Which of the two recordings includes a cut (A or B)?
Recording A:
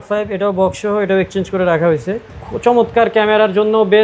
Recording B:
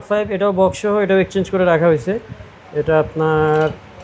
A